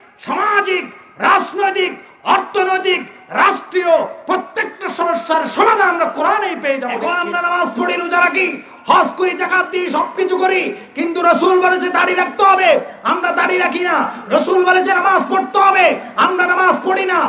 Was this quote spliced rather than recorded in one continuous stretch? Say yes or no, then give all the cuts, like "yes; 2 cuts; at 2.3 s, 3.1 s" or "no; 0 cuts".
yes; 1 cut; at 7.1 s